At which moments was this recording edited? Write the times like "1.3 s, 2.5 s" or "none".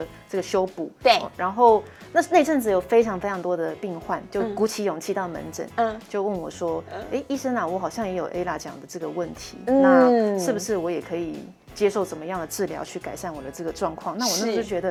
none